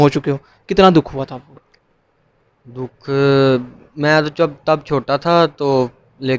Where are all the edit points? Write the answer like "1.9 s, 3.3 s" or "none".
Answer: none